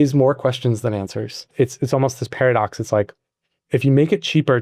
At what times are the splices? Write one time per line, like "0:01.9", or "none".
0:01.5